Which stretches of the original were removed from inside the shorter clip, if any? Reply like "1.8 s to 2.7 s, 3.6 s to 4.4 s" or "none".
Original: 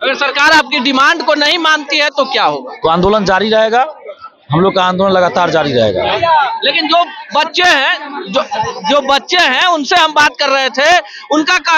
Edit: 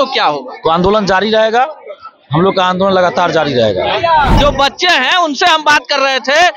6.5 s to 8.8 s